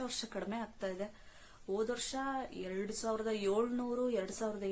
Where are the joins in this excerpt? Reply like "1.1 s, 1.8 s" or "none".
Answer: none